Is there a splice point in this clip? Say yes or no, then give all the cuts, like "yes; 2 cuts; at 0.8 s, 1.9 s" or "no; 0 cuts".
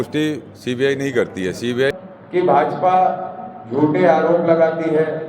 yes; 1 cut; at 1.9 s